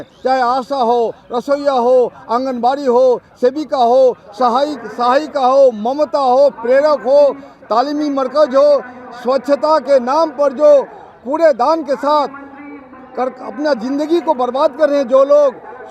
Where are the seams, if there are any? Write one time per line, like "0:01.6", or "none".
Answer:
none

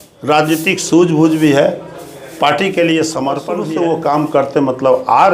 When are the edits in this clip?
0:03.5

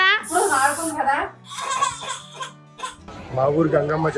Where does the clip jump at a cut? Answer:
0:03.1

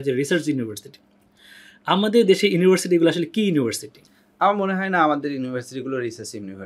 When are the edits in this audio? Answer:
none

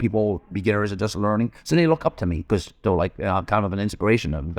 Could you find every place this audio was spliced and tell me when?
0:02.4

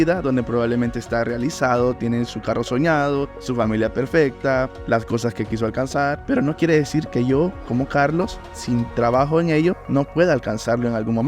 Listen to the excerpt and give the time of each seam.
0:03.4
0:04.8
0:06.2
0:09.8

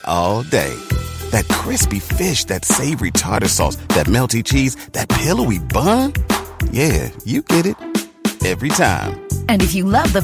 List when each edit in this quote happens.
none

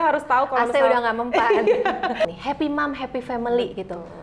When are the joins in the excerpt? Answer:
0:02.2

